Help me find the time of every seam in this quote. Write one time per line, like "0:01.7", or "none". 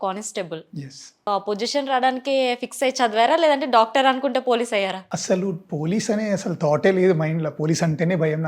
0:01.3